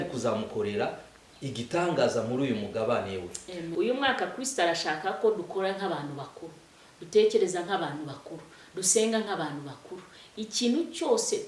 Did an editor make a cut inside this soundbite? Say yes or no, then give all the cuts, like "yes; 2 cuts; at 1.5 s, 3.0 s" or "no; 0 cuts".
yes; 1 cut; at 3.7 s